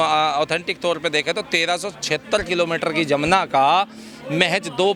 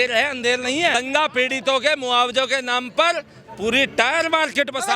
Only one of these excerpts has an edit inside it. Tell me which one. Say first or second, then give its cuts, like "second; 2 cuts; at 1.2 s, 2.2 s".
second; 1 cut; at 0.9 s